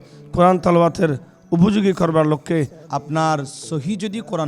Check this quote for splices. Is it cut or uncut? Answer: cut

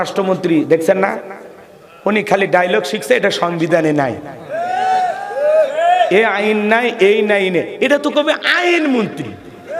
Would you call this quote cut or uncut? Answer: uncut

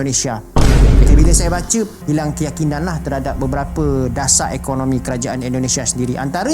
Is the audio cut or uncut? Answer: cut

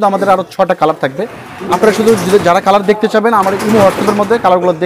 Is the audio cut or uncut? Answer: uncut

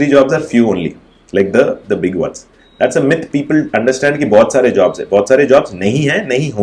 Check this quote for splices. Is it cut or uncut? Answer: uncut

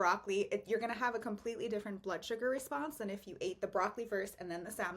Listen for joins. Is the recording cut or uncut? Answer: uncut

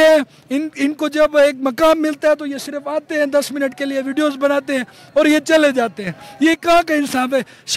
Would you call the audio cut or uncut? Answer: uncut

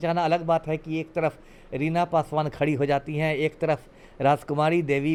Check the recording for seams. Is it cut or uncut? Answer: uncut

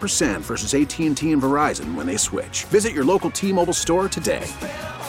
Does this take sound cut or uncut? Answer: uncut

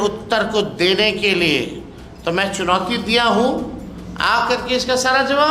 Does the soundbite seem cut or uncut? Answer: uncut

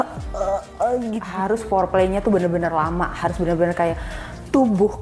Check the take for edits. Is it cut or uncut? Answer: cut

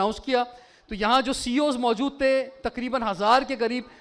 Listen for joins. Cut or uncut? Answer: uncut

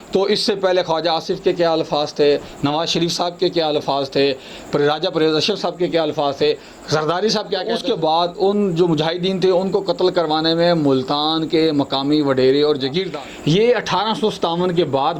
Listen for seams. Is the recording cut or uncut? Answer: cut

